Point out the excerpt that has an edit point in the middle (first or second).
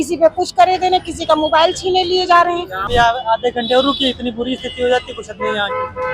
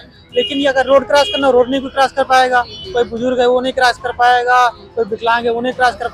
first